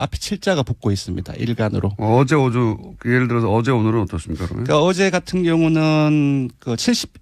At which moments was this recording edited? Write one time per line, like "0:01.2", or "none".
0:02.0